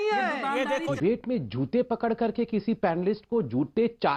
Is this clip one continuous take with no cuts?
no; 1 cut; at 0.9 s

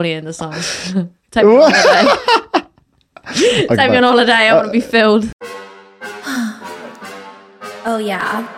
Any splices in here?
yes; 1 cut; at 5.3 s

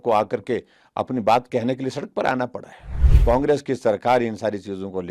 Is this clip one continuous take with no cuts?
no; 1 cut; at 3.1 s

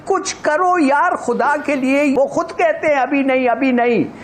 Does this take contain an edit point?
yes; 1 cut; at 2.1 s

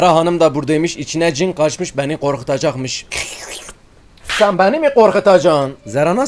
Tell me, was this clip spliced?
yes; 1 cut; at 3.0 s

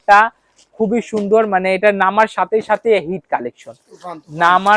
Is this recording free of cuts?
yes; 0 cuts

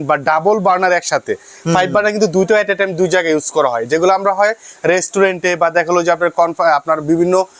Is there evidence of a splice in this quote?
no; 0 cuts

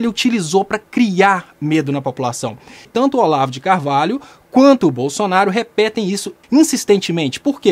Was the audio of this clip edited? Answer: yes; 2 cuts; at 2.8 s, 6.4 s

